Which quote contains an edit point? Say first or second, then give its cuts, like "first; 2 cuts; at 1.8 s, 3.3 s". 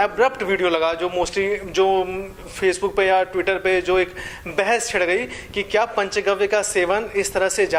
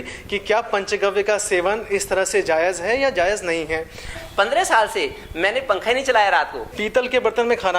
second; 2 cuts; at 4.2 s, 6.7 s